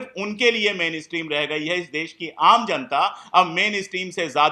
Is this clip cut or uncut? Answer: uncut